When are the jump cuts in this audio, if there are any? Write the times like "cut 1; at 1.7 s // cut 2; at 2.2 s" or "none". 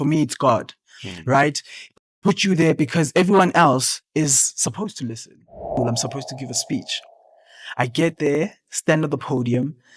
cut 1; at 5.8 s

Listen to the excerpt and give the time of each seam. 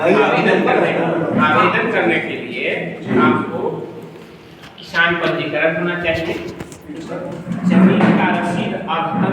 none

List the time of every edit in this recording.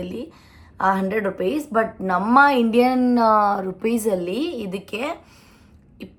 none

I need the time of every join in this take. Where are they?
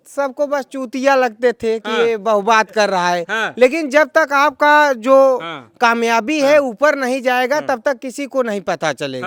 none

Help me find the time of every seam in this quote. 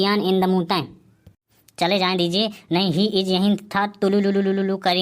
none

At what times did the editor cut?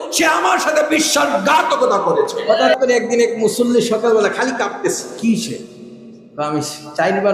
cut 1; at 2.7 s // cut 2; at 5.1 s

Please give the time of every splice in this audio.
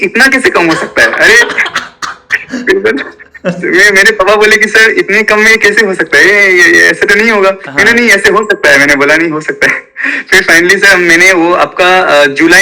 none

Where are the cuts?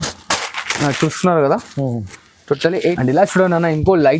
cut 1; at 3.0 s

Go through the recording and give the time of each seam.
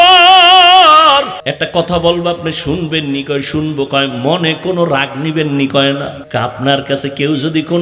cut 1; at 1.4 s // cut 2; at 6.2 s

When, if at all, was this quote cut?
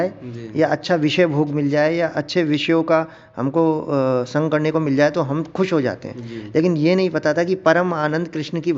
none

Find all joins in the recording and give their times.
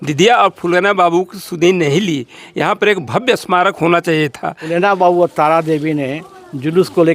cut 1; at 4.7 s

